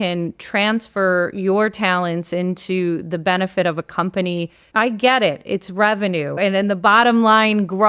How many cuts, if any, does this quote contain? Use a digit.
2